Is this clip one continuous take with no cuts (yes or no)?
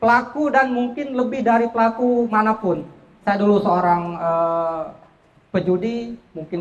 yes